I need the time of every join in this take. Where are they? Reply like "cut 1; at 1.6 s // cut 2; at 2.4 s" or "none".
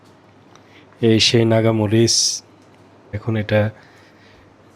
cut 1; at 3.2 s